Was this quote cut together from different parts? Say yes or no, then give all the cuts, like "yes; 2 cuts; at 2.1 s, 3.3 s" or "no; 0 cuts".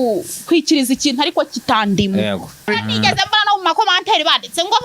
yes; 1 cut; at 2.7 s